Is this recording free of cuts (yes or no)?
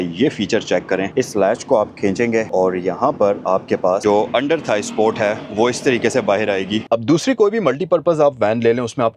no